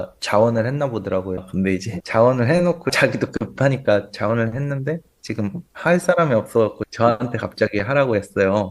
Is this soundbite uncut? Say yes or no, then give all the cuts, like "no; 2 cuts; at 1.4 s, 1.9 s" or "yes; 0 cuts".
no; 2 cuts; at 1.7 s, 6.8 s